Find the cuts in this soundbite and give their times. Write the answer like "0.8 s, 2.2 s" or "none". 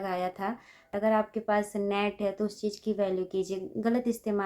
0.9 s